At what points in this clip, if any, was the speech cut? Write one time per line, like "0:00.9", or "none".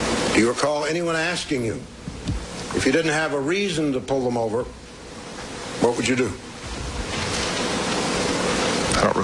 none